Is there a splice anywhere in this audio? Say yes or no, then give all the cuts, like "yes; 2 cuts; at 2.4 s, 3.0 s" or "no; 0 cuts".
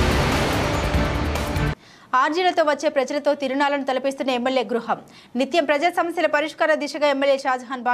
yes; 1 cut; at 1.6 s